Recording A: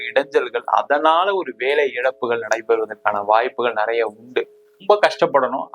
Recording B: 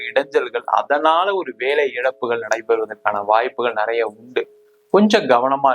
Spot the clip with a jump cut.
A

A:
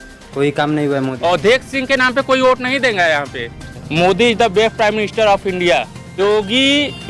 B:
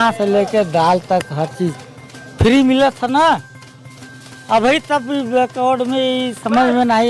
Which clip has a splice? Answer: A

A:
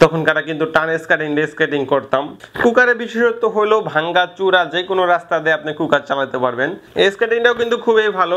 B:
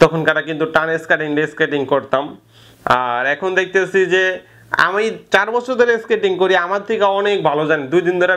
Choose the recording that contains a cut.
A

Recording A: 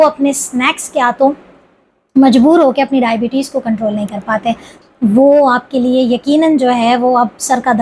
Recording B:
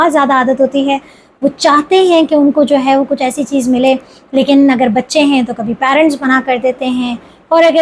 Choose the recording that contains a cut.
A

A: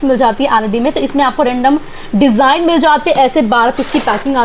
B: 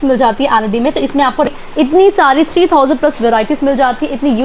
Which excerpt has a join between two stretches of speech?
B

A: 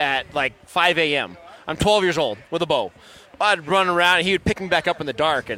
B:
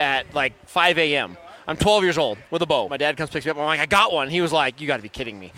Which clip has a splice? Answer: B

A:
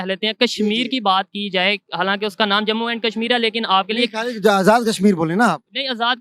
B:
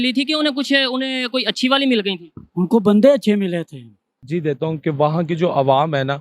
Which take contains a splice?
B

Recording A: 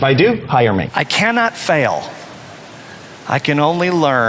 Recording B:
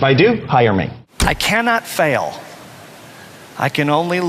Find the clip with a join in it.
A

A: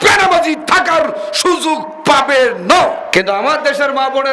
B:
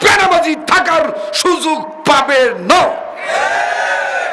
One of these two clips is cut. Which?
A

